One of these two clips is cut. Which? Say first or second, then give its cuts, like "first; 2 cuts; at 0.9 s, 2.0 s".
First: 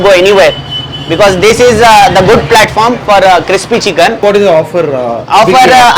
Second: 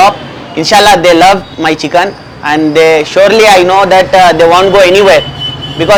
first; 1 cut; at 4.2 s